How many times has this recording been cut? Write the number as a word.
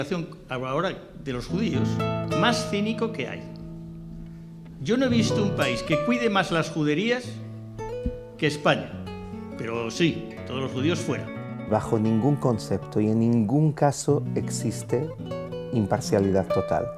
one